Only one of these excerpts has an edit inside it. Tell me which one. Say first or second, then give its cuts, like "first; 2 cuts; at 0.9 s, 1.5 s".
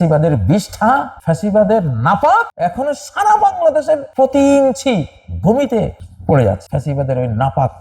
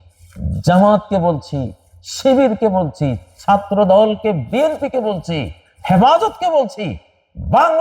first; 5 cuts; at 1.1 s, 2.5 s, 4.1 s, 6.1 s, 6.6 s